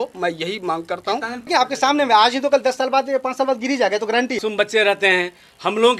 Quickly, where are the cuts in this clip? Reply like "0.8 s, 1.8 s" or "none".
1.5 s, 4.4 s